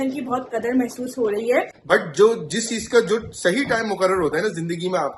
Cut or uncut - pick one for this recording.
cut